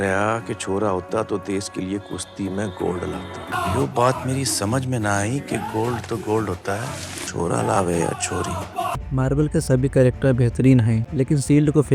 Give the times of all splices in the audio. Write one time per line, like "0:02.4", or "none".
0:09.0
0:11.0